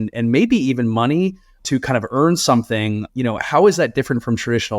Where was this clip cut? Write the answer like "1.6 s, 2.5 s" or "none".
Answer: 1.5 s, 3.1 s